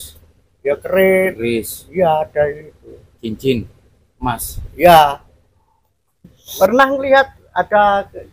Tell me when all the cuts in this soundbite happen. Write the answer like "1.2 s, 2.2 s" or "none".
6.5 s